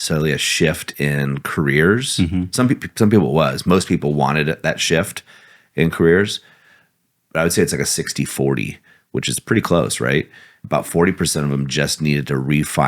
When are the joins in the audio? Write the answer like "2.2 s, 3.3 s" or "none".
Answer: 10.6 s